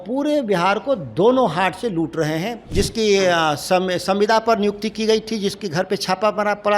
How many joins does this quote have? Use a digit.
1